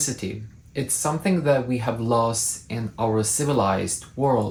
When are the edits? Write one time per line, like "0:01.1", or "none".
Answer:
none